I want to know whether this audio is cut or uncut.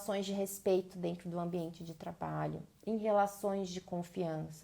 uncut